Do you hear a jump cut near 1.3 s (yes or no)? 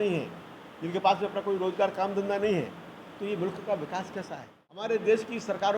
no